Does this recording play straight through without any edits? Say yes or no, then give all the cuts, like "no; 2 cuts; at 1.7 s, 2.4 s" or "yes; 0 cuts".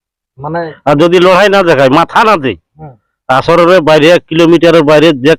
yes; 0 cuts